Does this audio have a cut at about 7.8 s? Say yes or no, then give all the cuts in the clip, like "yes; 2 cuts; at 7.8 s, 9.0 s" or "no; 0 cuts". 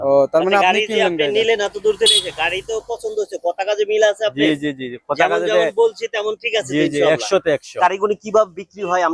yes; 1 cut; at 7.8 s